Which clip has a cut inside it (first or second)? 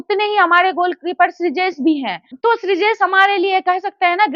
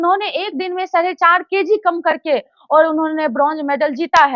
first